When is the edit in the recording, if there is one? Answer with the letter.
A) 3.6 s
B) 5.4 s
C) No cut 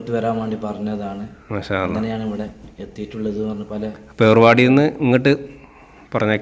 C